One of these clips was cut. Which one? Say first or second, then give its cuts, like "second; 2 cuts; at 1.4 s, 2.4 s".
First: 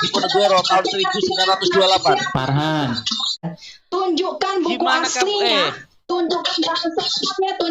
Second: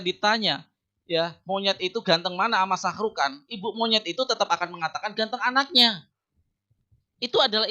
first; 1 cut; at 3.4 s